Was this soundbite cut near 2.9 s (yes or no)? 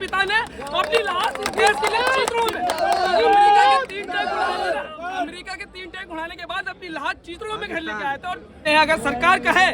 no